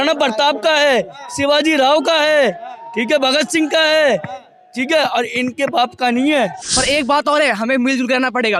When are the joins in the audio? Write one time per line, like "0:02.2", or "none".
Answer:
0:06.7